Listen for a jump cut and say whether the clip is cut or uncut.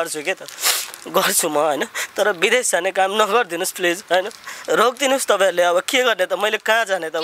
uncut